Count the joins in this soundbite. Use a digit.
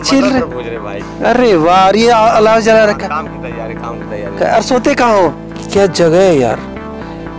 1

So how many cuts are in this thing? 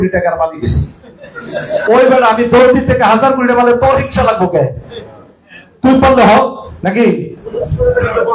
0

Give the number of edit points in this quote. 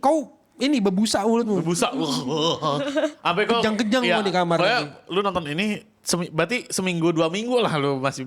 0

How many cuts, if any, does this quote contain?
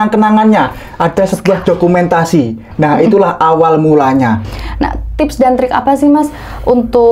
1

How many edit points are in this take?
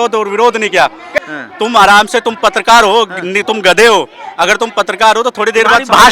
1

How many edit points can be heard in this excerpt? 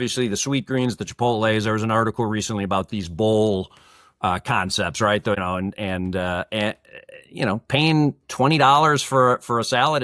1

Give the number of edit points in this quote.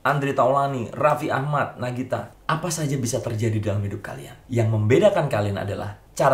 1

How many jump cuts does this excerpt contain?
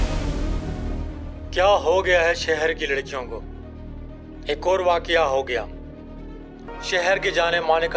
1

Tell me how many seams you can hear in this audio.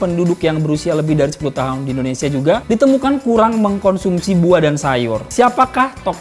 2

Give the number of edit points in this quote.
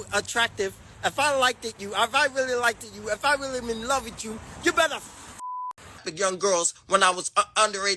1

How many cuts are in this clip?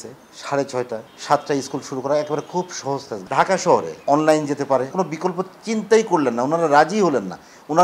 4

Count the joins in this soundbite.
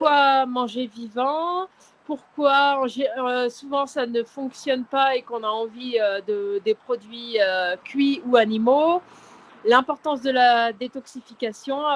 0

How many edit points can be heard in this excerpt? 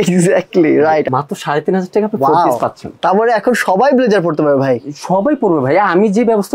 2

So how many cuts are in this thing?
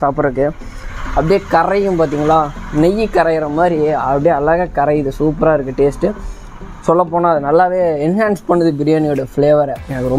0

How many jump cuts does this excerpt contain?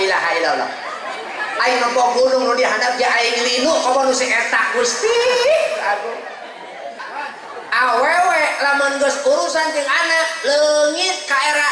1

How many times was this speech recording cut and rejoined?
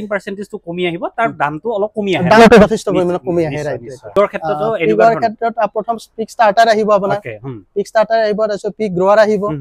1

